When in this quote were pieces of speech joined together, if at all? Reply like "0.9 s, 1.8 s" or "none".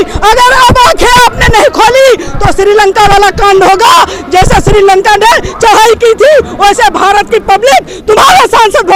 none

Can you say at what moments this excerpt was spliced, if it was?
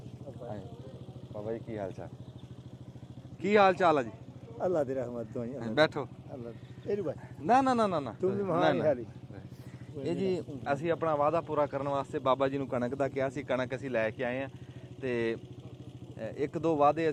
none

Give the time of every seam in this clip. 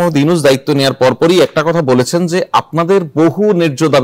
none

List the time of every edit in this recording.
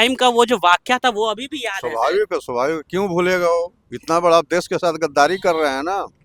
none

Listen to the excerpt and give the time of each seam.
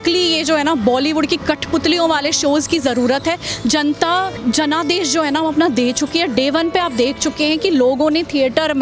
4.4 s

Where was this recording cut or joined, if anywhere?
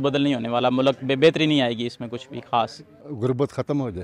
2.9 s

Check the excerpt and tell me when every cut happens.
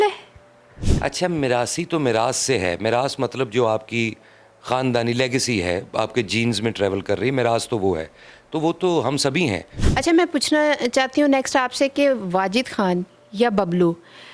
9.7 s

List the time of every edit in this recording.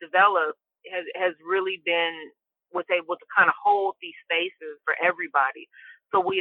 4.9 s

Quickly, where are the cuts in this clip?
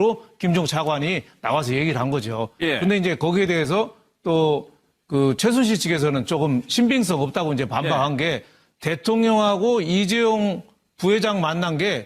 10.0 s

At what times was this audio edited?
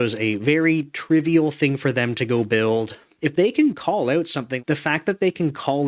3.0 s, 4.6 s

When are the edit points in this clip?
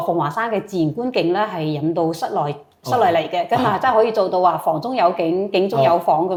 none

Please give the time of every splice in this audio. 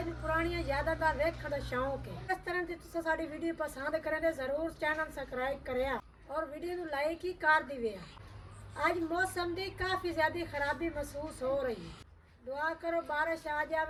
none

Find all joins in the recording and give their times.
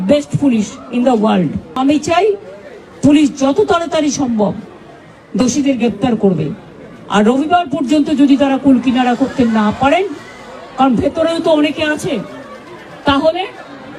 1.8 s

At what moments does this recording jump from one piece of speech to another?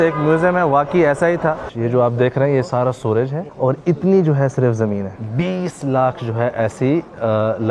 1.7 s, 3.4 s, 5.1 s

